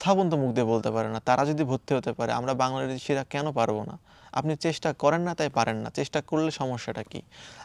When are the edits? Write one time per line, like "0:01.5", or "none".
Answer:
none